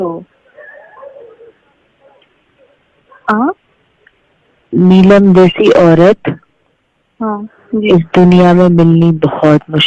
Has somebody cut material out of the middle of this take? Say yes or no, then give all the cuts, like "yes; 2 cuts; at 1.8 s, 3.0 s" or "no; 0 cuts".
no; 0 cuts